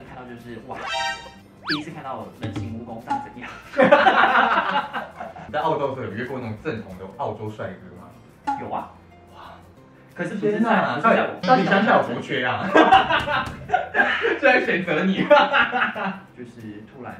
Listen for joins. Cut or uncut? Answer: uncut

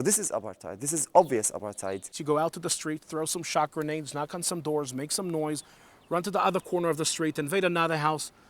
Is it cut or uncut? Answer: cut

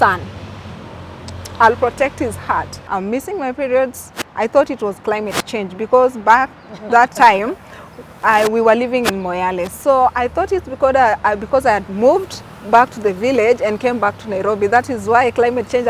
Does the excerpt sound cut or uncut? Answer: cut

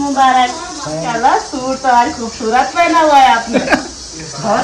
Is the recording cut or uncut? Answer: cut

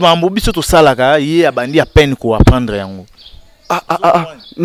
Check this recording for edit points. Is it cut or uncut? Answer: uncut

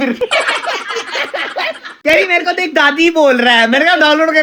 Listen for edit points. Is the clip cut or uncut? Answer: uncut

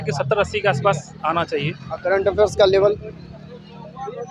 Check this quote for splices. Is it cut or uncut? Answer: uncut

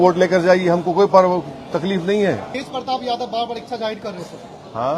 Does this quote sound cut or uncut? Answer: cut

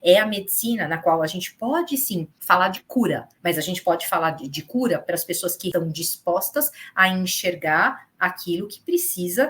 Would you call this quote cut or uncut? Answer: cut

